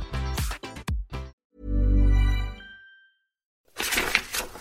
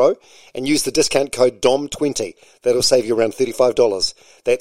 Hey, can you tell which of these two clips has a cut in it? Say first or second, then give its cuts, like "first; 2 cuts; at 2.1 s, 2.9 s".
first; 2 cuts; at 1.3 s, 3.7 s